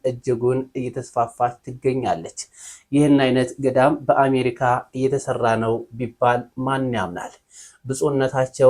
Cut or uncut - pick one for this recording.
uncut